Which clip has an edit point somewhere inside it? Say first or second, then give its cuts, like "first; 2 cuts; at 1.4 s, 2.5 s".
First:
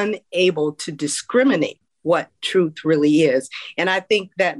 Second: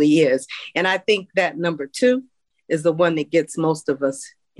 first; 1 cut; at 1.9 s